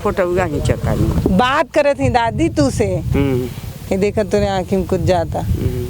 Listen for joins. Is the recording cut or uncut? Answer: cut